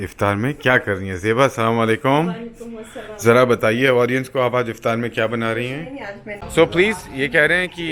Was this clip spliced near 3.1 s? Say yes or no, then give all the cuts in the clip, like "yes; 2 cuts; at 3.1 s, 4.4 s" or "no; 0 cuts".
no; 1 cut; at 6.5 s